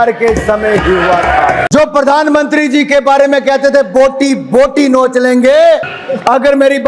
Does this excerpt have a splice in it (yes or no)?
yes